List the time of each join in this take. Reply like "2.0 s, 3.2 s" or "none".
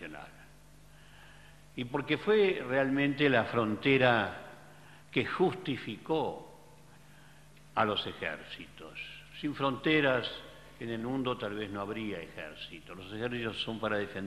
7.4 s